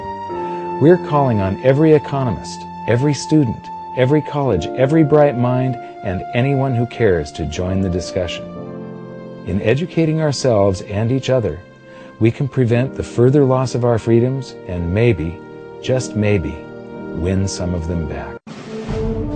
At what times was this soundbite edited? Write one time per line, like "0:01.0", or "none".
0:18.4